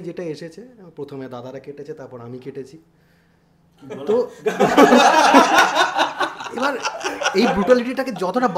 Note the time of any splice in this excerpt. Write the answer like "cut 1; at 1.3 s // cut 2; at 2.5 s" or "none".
none